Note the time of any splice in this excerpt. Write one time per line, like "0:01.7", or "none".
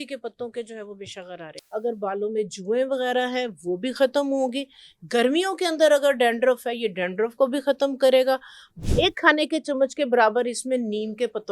0:01.5
0:08.7